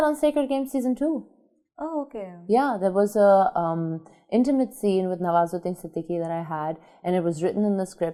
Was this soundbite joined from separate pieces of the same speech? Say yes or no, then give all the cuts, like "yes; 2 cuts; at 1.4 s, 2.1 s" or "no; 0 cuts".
no; 0 cuts